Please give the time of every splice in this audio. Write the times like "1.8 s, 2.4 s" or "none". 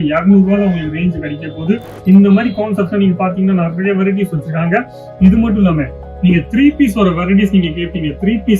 1.9 s